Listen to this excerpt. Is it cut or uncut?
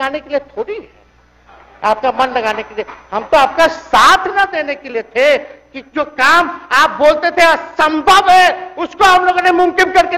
uncut